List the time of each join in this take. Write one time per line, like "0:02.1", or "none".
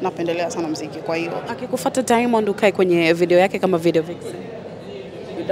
0:01.5